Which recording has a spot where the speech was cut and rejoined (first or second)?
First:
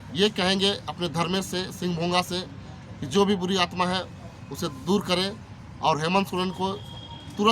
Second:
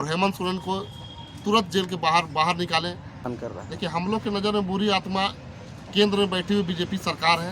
second